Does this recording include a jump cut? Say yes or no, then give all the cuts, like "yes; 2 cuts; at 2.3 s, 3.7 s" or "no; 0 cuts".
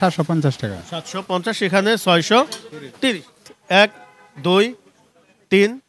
yes; 1 cut; at 3.5 s